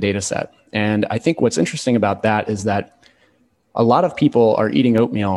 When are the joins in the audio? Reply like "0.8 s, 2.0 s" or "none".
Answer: none

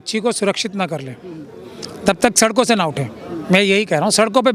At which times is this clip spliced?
none

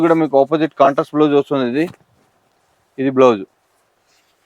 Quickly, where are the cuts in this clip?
none

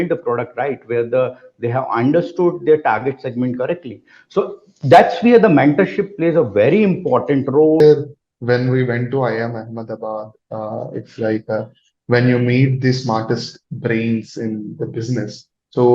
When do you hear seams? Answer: 7.8 s

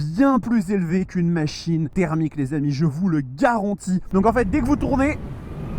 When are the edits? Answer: 1.9 s, 4.0 s

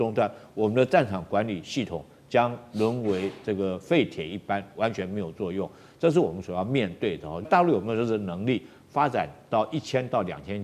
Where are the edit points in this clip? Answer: 7.4 s

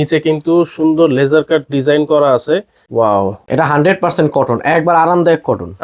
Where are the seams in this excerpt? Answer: 2.8 s, 3.4 s

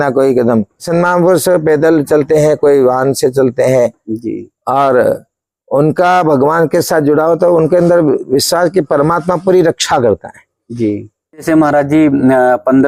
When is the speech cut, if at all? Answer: 0.9 s, 11.4 s

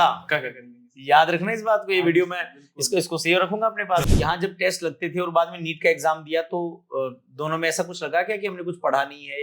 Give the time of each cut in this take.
4.3 s

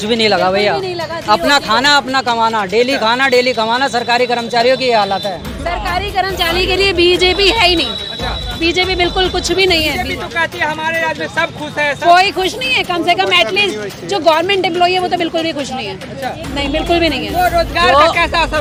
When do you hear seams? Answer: none

